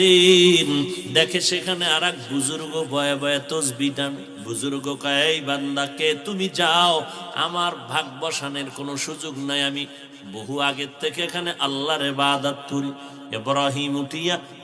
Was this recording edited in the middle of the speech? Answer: yes; 1 cut; at 4.3 s

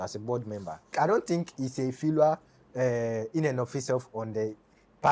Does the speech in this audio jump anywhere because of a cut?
yes; 1 cut; at 0.9 s

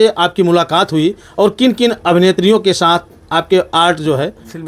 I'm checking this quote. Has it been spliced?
no; 0 cuts

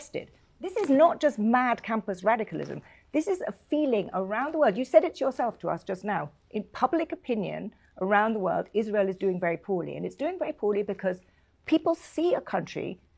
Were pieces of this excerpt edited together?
no; 0 cuts

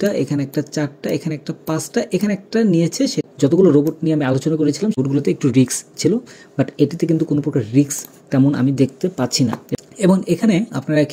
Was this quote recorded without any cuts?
no; 3 cuts; at 3.3 s, 5.0 s, 9.6 s

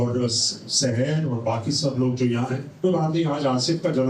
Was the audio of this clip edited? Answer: yes; 1 cut; at 2.8 s

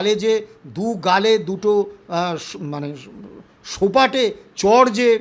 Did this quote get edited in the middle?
no; 0 cuts

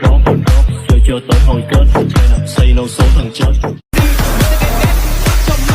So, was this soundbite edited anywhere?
yes; 1 cut; at 3.9 s

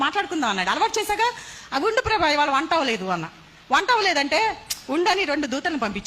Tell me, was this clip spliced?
yes; 1 cut; at 1.5 s

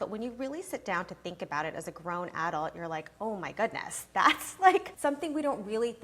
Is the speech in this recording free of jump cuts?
no; 1 cut; at 4.9 s

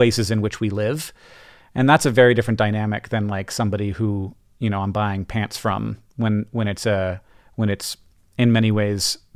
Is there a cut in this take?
no; 0 cuts

